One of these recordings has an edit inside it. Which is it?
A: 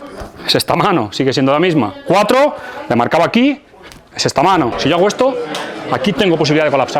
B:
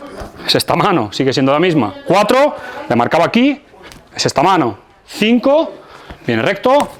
A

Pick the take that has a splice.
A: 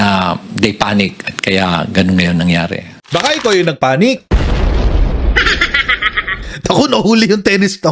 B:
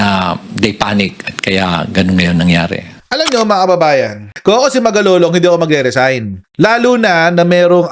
B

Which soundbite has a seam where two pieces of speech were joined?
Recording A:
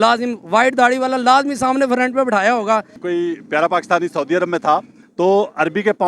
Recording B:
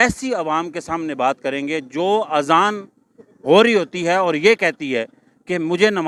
A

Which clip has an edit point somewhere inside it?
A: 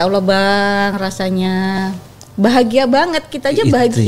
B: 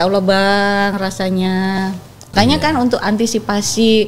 B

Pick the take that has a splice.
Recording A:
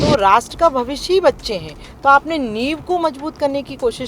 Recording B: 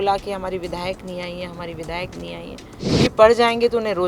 B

